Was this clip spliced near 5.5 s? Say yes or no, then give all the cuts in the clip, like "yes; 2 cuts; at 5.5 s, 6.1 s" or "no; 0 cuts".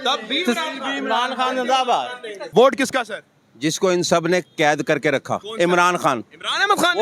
yes; 2 cuts; at 2.5 s, 5.5 s